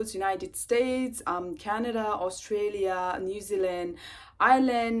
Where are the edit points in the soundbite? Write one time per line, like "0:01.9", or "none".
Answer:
none

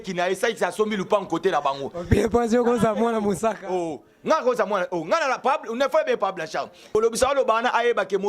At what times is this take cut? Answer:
0:07.0

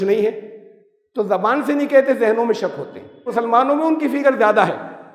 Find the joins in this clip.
0:03.3

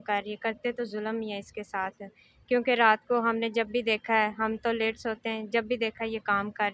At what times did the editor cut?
none

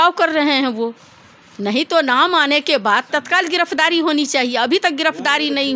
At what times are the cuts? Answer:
none

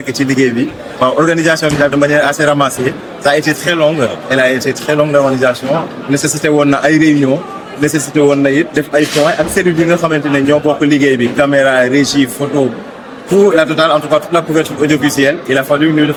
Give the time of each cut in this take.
none

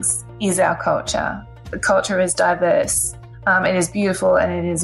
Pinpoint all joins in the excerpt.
0:01.6

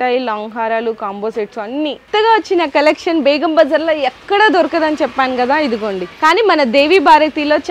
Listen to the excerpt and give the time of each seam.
0:02.1
0:06.1

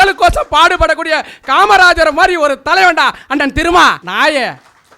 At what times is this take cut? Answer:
0:04.0

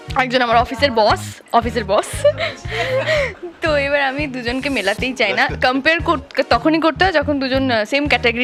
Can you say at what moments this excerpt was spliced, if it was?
none

